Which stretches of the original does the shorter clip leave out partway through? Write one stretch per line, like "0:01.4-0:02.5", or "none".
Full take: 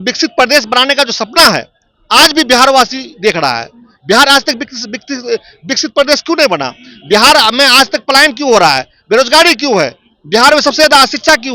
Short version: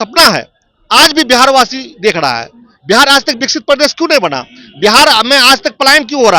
0:04.6-0:05.7